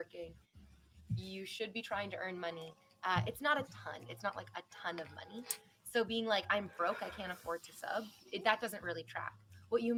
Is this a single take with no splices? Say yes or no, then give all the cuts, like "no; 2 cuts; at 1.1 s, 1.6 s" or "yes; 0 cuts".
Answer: yes; 0 cuts